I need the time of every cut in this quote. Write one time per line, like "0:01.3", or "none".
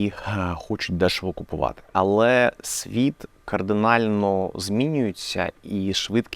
0:01.8